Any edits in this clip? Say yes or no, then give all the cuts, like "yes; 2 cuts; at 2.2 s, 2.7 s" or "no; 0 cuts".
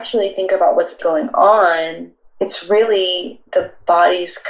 yes; 1 cut; at 1.0 s